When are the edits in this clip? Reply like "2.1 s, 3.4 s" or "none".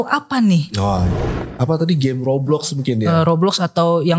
1.2 s

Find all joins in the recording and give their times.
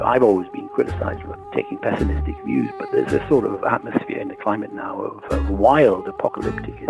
1.3 s

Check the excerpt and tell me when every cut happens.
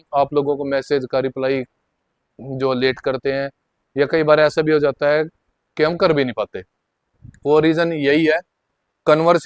none

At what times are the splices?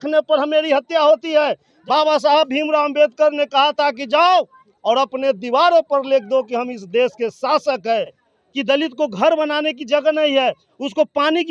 1.7 s, 8.2 s

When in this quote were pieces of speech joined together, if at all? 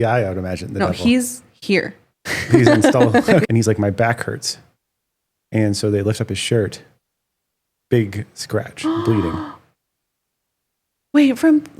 3.4 s

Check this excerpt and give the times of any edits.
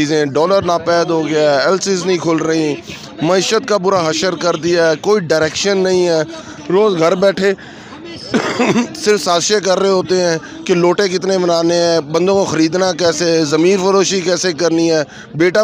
none

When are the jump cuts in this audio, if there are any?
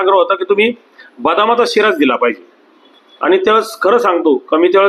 none

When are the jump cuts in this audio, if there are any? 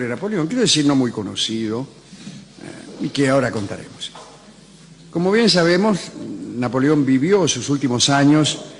7.4 s

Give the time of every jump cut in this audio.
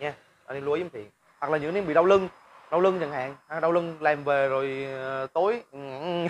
1.3 s

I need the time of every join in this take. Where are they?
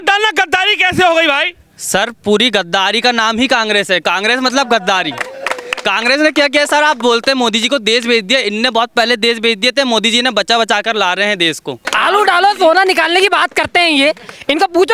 11.8 s

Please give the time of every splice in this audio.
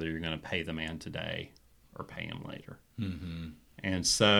none

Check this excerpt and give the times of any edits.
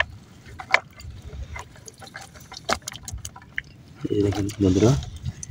none

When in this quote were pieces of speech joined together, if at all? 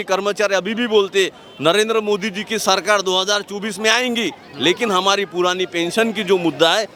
none

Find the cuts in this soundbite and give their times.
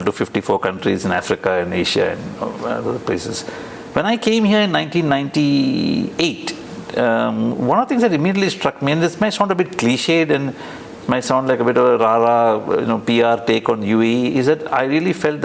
none

